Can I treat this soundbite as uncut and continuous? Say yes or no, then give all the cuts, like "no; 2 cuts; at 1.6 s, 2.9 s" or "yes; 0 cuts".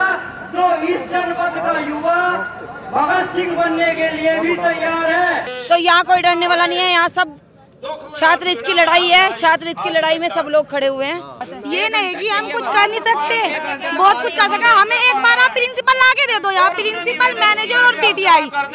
no; 2 cuts; at 5.5 s, 11.4 s